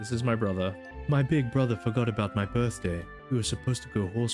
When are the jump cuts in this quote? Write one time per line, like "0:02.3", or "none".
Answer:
0:00.9
0:03.1